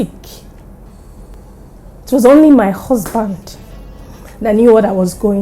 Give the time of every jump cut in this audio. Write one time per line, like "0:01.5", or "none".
0:01.4